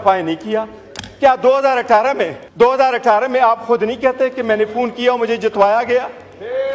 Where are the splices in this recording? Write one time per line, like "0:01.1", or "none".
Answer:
0:02.4